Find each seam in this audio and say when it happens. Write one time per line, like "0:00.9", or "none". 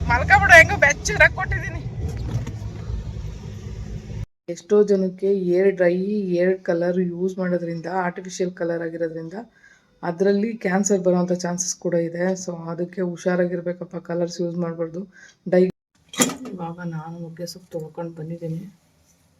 0:04.1
0:15.7